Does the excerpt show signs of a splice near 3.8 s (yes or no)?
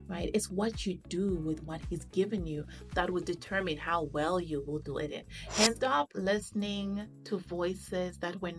no